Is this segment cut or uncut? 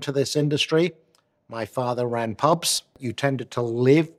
cut